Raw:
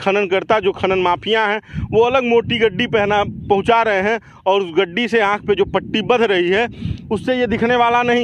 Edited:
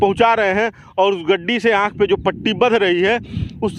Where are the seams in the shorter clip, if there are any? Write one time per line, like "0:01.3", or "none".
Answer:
none